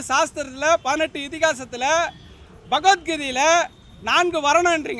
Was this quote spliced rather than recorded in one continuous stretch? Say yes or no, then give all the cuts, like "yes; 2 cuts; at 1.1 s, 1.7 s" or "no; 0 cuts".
no; 0 cuts